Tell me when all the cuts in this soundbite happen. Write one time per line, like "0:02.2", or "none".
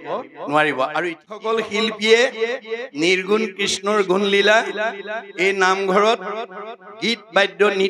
0:01.4